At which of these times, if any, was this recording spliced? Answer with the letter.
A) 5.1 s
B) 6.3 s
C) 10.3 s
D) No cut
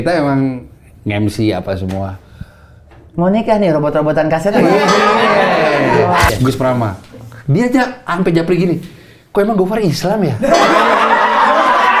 B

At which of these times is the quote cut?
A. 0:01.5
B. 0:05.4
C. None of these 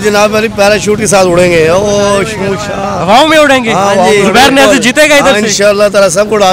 C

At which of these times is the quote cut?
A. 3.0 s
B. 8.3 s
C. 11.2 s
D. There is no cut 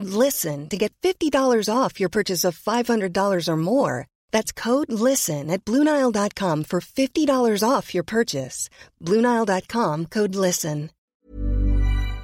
C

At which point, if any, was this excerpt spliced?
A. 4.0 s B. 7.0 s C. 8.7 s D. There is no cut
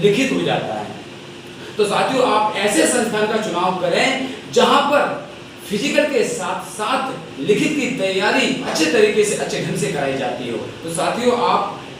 C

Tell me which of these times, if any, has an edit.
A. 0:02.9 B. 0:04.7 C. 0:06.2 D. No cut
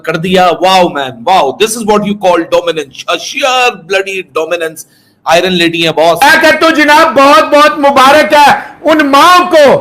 C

